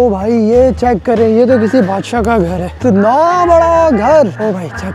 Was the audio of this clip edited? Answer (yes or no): no